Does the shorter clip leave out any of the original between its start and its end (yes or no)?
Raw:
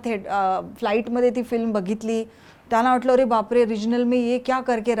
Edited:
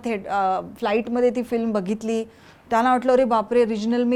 no